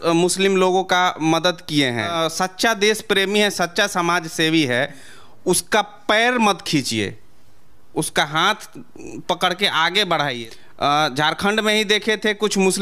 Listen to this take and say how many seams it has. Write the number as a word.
two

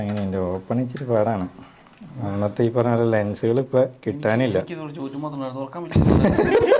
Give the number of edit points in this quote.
zero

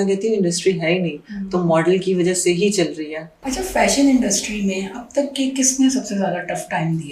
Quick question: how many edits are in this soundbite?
zero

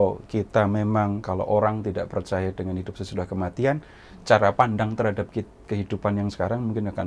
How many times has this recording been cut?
zero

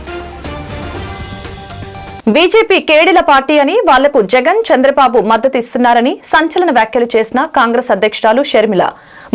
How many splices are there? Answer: one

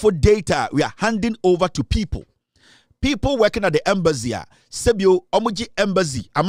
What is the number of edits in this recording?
zero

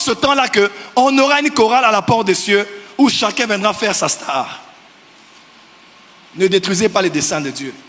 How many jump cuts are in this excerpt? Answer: zero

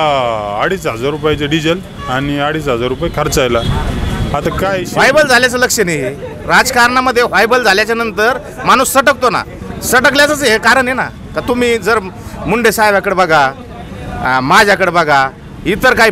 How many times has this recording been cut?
one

